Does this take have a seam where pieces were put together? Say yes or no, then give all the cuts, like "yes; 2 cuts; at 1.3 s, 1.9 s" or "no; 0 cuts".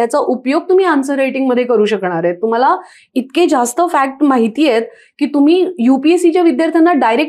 no; 0 cuts